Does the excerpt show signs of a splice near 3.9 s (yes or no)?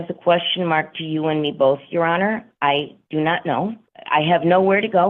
yes